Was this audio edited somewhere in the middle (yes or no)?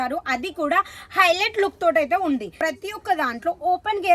yes